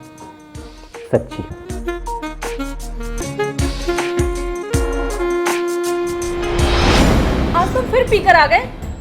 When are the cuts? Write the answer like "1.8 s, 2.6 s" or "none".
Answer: 3.2 s, 7.0 s

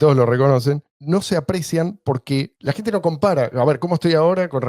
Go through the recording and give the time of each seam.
0.9 s

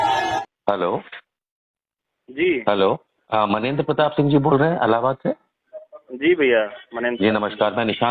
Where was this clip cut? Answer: none

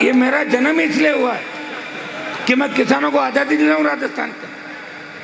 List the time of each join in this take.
none

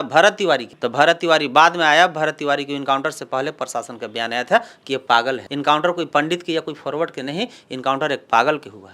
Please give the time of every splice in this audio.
5.5 s

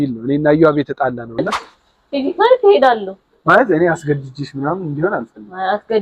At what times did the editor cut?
1.6 s

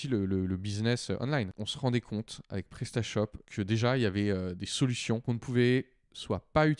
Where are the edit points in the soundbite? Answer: 1.5 s, 3.4 s, 5.2 s

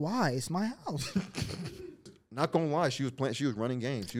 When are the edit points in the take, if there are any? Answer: 2.2 s

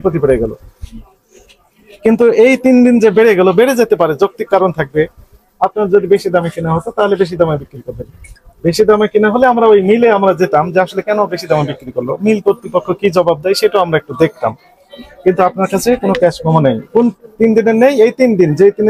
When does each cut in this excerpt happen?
none

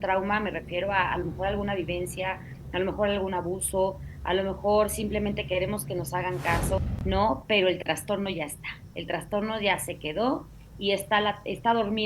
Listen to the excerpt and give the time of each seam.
6.8 s

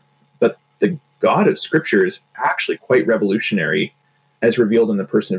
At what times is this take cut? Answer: none

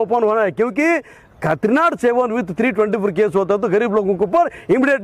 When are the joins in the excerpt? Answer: none

